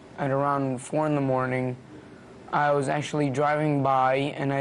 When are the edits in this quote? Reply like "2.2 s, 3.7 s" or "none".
3.3 s